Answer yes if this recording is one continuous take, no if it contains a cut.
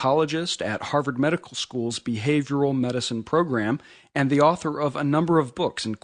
no